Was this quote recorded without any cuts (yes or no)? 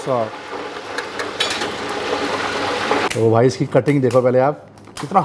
no